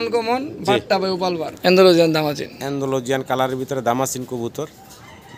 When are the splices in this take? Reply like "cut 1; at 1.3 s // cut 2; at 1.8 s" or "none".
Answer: cut 1; at 1.5 s